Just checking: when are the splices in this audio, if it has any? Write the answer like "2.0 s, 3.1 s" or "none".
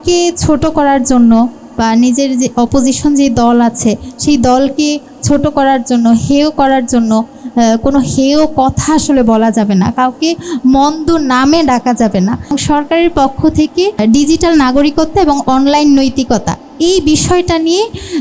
12.5 s, 14.0 s